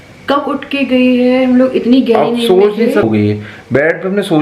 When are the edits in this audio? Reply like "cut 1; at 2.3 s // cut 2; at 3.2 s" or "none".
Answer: cut 1; at 3.0 s